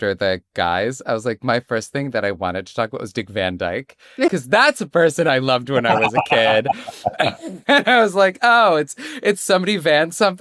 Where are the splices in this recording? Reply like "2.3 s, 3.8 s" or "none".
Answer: none